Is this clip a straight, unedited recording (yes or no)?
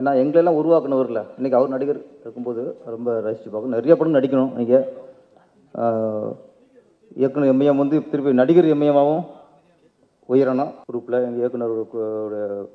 no